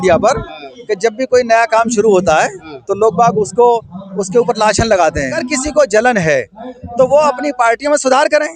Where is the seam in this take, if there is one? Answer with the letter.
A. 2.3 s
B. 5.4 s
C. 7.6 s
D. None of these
B